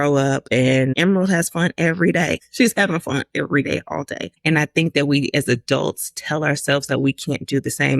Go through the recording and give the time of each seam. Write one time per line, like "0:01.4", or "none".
0:00.9
0:02.4
0:04.2